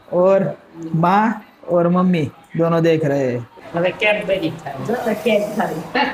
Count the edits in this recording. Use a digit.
1